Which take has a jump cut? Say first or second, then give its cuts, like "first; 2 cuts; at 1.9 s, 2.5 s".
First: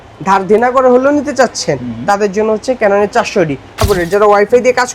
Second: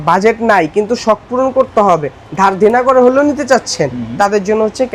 first; 1 cut; at 3.8 s